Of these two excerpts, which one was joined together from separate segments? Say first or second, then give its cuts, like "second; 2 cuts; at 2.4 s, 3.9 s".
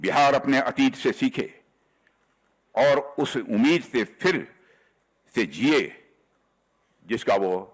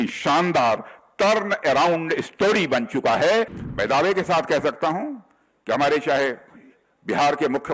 second; 1 cut; at 3.6 s